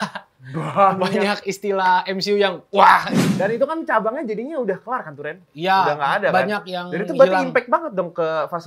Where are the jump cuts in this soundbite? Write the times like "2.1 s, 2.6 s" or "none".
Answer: 3.2 s